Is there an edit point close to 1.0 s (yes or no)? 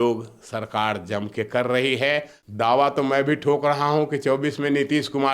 no